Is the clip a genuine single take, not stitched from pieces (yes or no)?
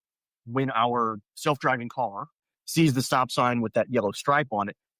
no